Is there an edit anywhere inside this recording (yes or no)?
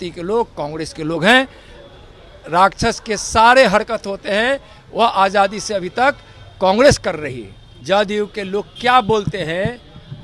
yes